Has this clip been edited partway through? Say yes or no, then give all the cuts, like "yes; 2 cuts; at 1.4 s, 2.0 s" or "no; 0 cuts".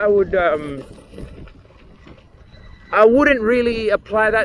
no; 0 cuts